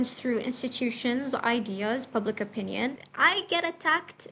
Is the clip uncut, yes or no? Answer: no